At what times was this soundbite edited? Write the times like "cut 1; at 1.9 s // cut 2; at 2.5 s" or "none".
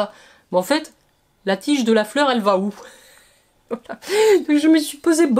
none